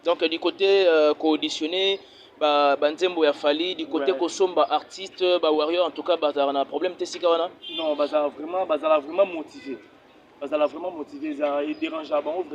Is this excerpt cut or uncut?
uncut